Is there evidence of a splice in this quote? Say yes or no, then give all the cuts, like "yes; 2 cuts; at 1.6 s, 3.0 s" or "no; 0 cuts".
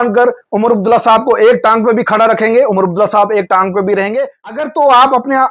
yes; 1 cut; at 4.6 s